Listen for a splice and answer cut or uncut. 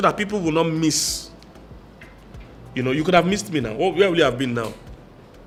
uncut